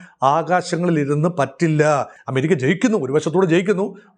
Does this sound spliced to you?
yes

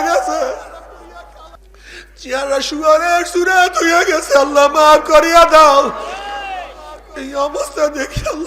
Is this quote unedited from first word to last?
no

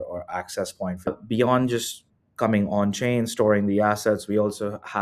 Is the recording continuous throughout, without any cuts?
no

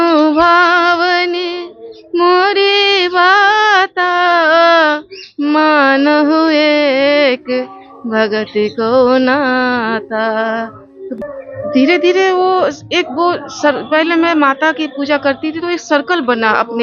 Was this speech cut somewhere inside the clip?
yes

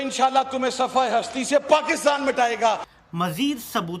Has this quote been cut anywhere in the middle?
yes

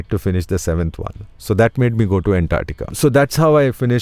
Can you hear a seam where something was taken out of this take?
yes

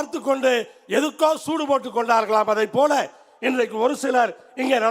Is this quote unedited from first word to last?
yes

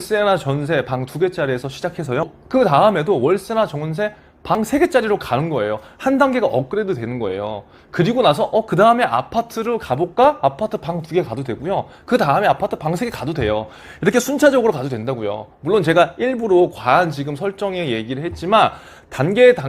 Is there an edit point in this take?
no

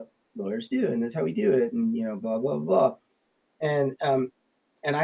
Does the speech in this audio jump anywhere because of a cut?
no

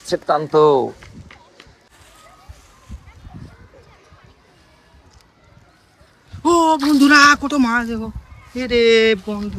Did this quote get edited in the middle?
yes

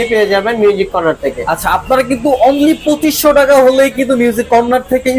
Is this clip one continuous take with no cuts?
yes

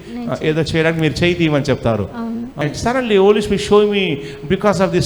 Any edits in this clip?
yes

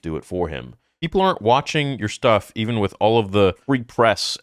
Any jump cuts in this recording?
yes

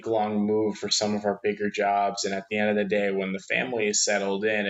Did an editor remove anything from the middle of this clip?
no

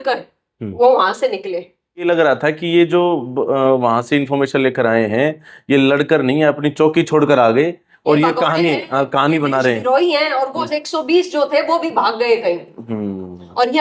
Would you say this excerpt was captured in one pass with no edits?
no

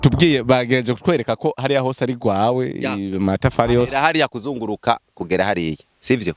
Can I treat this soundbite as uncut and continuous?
yes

